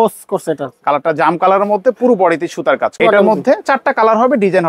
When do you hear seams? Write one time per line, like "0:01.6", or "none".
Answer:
0:02.9